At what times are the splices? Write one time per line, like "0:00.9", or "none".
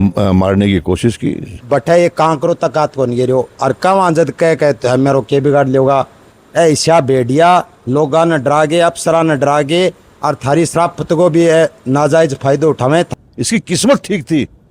0:01.5
0:06.3
0:13.1